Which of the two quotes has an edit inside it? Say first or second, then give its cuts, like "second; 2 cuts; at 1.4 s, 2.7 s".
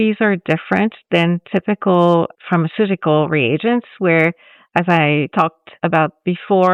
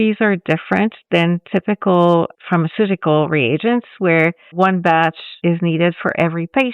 second; 1 cut; at 4.5 s